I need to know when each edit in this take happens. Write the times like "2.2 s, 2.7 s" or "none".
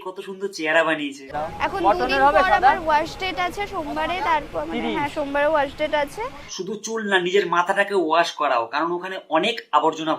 1.2 s